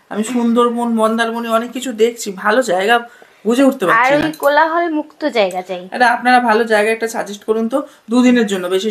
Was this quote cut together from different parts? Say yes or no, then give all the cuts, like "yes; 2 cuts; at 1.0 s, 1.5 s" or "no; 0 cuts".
no; 0 cuts